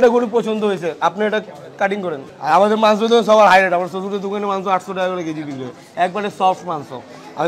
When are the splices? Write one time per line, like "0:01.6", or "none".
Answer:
none